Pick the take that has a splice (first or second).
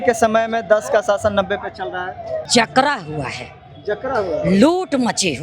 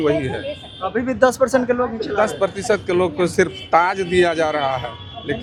first